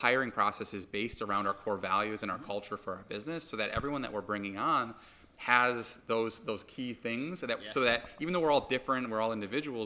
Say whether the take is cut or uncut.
uncut